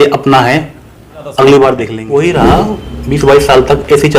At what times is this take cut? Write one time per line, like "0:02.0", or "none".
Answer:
0:02.0

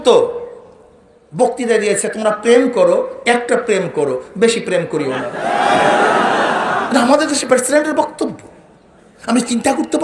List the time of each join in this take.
none

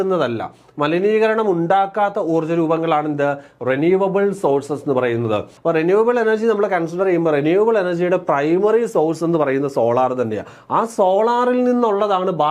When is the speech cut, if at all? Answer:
0:05.5

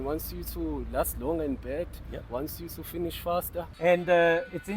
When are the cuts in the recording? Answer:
0:03.7

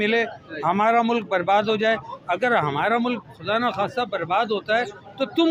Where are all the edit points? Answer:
none

